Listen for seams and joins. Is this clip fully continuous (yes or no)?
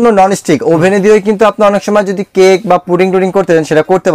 yes